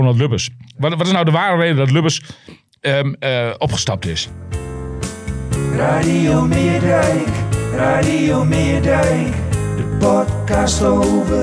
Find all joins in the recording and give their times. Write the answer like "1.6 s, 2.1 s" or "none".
4.3 s